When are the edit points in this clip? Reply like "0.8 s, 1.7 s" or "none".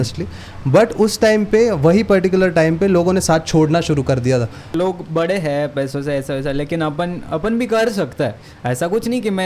4.7 s